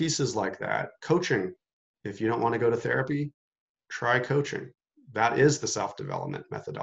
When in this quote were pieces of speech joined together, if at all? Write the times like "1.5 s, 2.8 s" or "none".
0.9 s